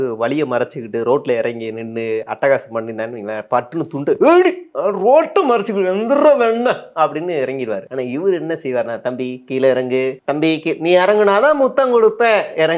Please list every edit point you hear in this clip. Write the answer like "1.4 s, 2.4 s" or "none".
7.9 s, 10.2 s